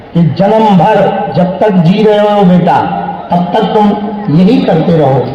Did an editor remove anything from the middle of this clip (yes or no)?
no